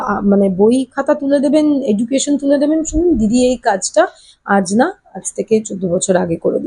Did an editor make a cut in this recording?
no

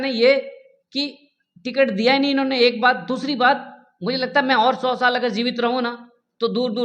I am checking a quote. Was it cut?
no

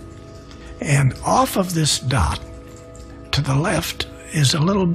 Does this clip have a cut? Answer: yes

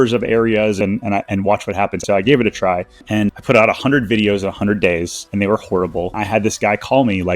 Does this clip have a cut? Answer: yes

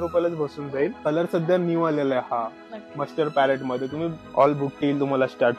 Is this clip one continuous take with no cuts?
no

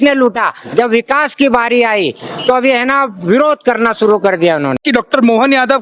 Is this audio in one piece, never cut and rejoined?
no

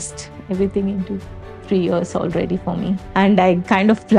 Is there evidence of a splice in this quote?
yes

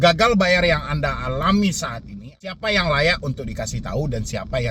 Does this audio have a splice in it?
yes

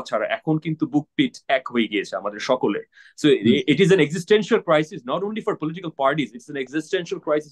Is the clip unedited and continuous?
yes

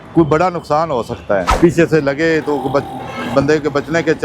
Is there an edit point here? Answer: yes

